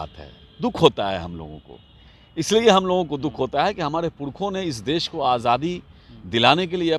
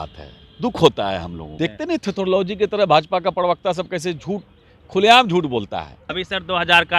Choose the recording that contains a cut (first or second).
second